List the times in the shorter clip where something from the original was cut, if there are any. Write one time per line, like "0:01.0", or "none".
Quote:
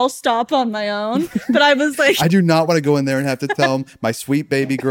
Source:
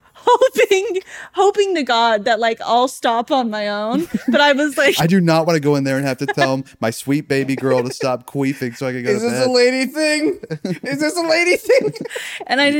none